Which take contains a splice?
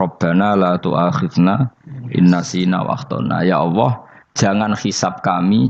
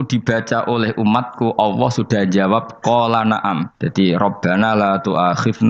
second; 1 cut; at 3.8 s

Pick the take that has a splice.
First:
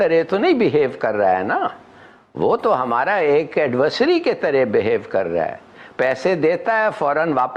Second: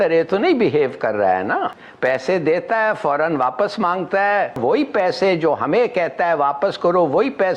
second; 2 cuts; at 1.8 s, 4.6 s

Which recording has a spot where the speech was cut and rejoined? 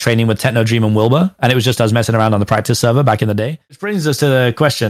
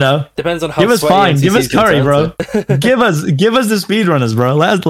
first; 1 cut; at 3.6 s

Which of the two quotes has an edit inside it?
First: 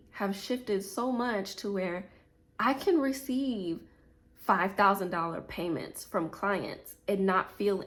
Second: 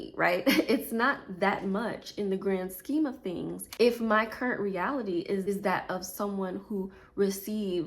second; 2 cuts; at 3.6 s, 5.5 s

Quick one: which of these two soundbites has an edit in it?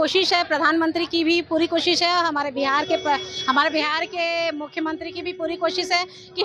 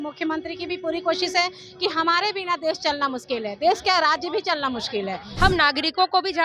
second; 1 cut; at 5.3 s

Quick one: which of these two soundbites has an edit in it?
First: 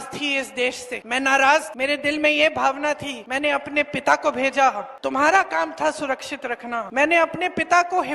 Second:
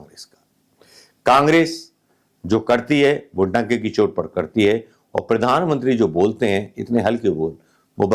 first; 5 cuts; at 0.9 s, 1.7 s, 3.2 s, 4.9 s, 6.9 s

